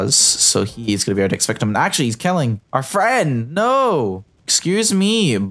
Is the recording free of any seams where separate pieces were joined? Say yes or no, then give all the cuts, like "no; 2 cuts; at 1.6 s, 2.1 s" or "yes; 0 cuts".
yes; 0 cuts